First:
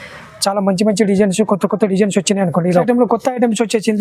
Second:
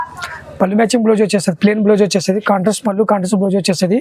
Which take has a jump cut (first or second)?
first